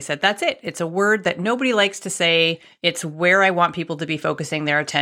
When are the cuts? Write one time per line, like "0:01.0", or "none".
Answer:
0:02.7